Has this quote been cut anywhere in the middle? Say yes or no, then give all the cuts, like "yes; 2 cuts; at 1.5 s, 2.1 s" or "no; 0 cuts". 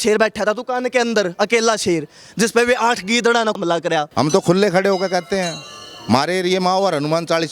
yes; 1 cut; at 4.1 s